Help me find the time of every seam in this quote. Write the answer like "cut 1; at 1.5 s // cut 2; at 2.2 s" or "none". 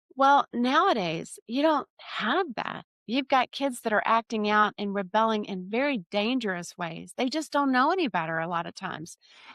none